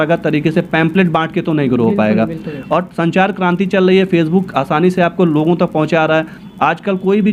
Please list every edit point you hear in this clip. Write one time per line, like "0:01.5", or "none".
none